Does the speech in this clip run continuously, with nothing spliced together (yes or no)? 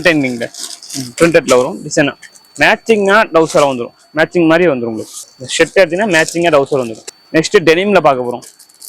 no